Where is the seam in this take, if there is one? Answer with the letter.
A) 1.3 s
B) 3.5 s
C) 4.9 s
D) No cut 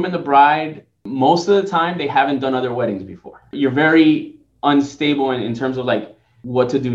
B